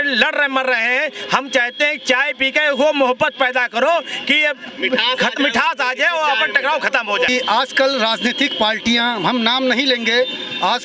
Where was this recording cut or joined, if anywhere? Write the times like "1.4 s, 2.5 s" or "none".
7.3 s